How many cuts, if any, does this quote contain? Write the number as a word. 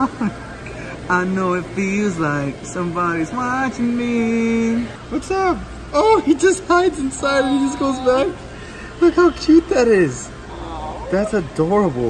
one